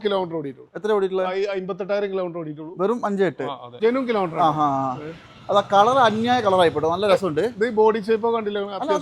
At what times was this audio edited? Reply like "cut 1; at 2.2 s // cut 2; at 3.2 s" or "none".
cut 1; at 3.7 s